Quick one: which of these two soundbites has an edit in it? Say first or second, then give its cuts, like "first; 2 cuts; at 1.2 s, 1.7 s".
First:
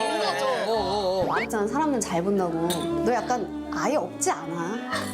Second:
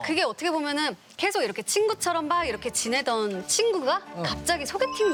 first; 1 cut; at 1.3 s